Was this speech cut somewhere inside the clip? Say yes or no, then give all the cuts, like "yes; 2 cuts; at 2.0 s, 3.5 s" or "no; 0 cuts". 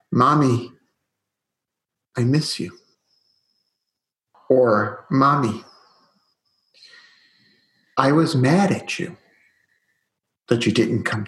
yes; 1 cut; at 4.4 s